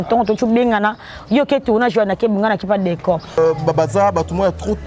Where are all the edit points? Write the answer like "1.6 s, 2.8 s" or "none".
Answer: 3.4 s